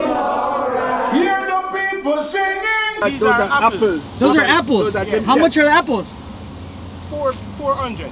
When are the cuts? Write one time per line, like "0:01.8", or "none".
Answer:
0:03.0